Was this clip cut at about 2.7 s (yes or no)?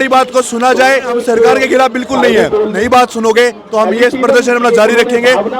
yes